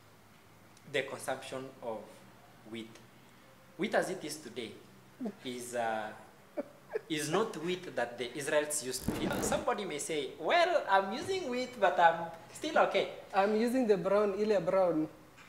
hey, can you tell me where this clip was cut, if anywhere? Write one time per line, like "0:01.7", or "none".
0:09.3

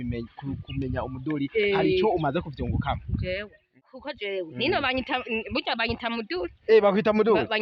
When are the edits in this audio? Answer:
0:03.8

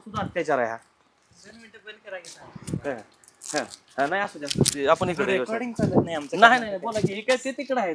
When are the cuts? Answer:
none

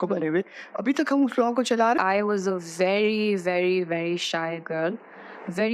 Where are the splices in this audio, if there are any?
0:02.0

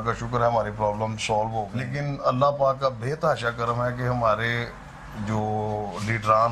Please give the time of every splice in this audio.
0:01.9

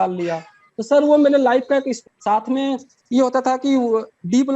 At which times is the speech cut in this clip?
0:02.0

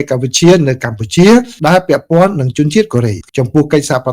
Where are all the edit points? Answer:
0:03.2

